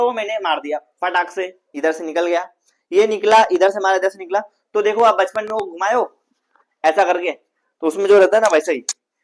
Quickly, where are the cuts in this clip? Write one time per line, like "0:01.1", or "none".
none